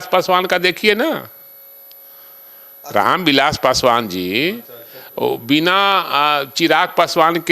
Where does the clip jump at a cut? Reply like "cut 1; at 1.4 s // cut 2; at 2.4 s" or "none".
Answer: none